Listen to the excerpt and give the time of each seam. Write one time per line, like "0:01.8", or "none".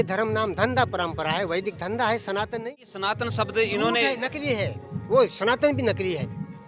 0:02.5